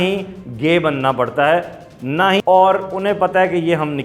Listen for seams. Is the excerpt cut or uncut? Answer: cut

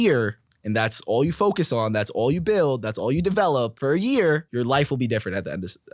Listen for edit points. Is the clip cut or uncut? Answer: cut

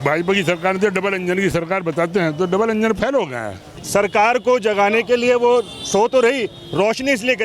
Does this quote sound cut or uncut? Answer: cut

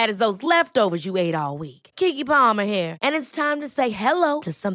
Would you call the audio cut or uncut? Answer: uncut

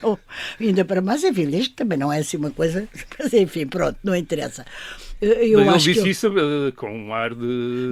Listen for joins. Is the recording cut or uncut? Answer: uncut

